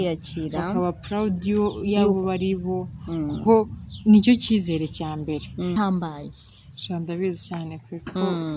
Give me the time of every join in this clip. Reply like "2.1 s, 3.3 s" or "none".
5.8 s